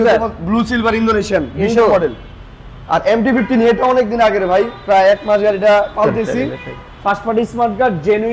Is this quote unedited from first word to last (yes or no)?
yes